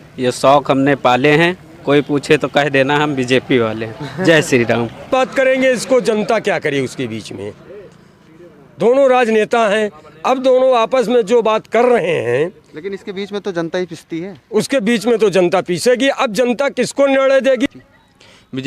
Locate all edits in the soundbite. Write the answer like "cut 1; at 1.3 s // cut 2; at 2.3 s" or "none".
cut 1; at 5.1 s // cut 2; at 17.7 s

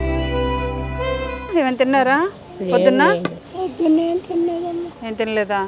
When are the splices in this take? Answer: cut 1; at 1.5 s

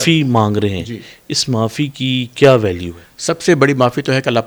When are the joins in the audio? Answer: none

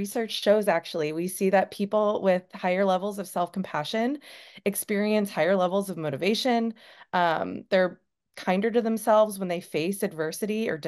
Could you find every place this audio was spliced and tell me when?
none

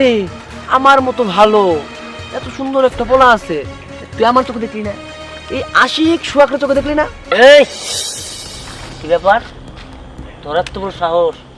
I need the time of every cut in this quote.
cut 1; at 7.2 s

